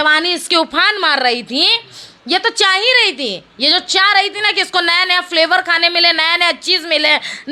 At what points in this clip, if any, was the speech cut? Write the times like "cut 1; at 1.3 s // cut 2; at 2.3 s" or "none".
none